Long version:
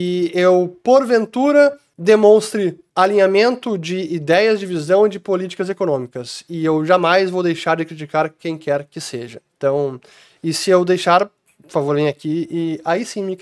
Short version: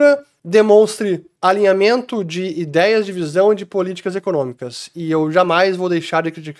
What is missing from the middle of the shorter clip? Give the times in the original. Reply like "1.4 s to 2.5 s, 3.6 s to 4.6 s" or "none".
none